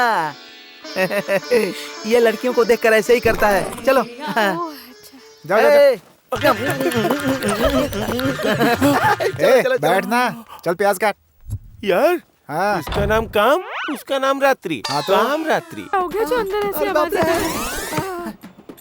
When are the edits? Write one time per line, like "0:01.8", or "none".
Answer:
0:15.9

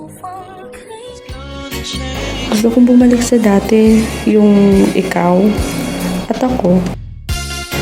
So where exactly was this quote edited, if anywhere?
0:01.2

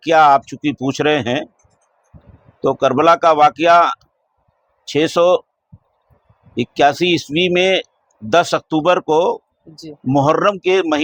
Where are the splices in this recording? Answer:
none

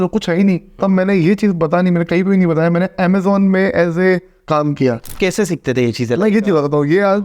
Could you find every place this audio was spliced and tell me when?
0:05.1

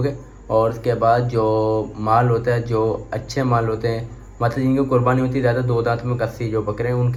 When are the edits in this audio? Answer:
none

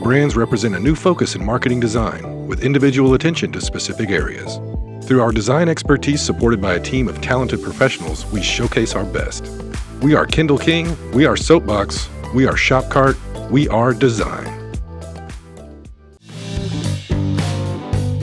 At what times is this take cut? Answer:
0:16.4

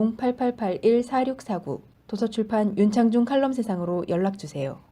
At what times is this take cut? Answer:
0:01.8

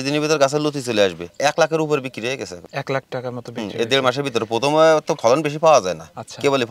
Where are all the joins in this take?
0:01.3
0:02.6

